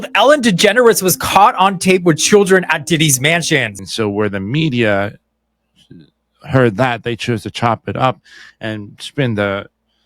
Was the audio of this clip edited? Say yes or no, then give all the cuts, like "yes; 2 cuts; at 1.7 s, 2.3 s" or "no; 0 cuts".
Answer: yes; 1 cut; at 3.8 s